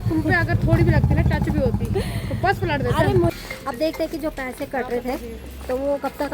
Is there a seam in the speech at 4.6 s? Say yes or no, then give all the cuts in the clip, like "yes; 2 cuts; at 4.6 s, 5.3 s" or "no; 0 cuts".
no; 1 cut; at 3.3 s